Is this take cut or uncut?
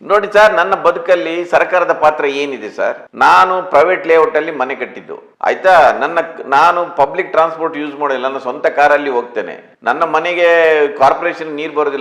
uncut